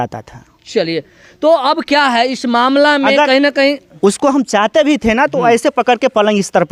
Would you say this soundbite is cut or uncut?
uncut